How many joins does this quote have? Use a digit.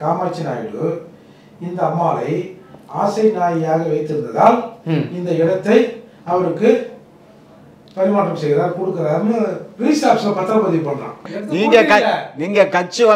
1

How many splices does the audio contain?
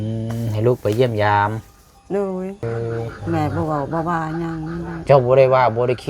1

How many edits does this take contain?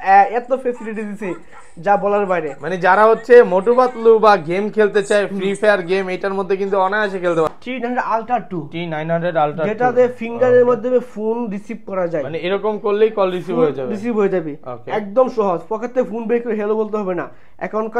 1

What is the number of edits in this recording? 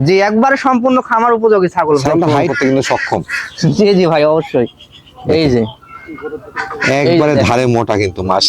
1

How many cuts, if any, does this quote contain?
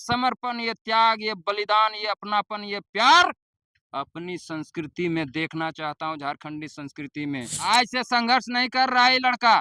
1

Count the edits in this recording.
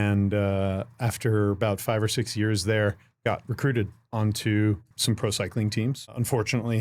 2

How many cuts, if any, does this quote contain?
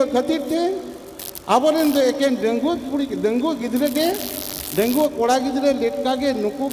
0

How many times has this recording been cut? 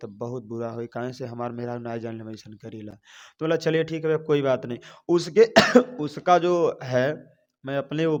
0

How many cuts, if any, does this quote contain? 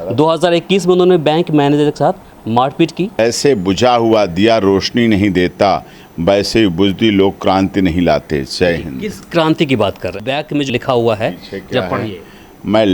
3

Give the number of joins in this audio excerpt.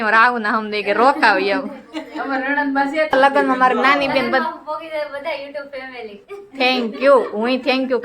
1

